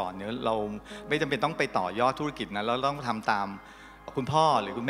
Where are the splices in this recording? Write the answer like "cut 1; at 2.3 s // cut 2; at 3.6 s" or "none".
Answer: cut 1; at 0.9 s // cut 2; at 4.1 s